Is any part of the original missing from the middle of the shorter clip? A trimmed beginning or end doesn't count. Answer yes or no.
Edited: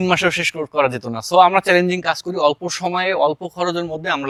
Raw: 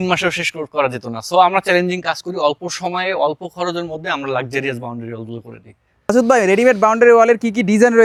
no